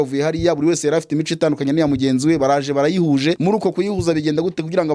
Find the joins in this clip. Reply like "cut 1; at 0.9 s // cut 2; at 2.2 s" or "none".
cut 1; at 3.4 s

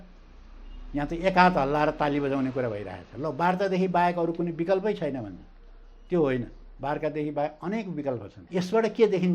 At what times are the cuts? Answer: cut 1; at 8.3 s

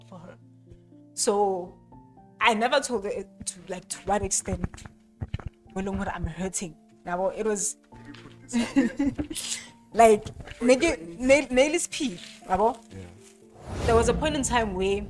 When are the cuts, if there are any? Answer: cut 1; at 13.7 s

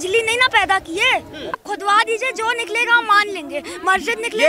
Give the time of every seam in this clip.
cut 1; at 1.6 s

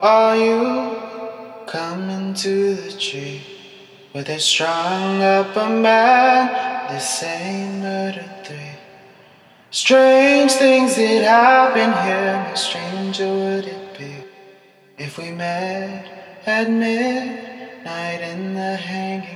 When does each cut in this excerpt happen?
none

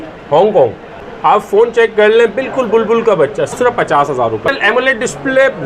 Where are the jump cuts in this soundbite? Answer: cut 1; at 1.0 s // cut 2; at 3.5 s // cut 3; at 4.5 s

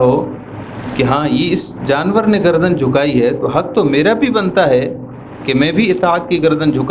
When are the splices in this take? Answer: none

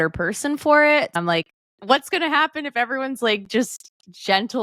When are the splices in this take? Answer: cut 1; at 1.2 s

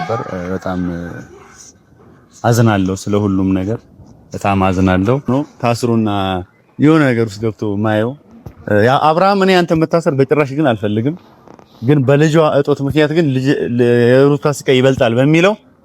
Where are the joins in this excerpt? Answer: cut 1; at 5.5 s

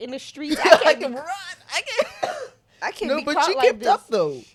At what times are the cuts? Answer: none

